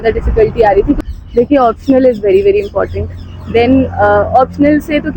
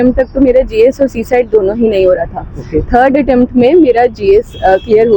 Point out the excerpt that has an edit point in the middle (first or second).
first